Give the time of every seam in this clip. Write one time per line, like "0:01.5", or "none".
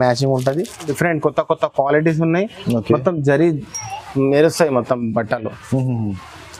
0:00.9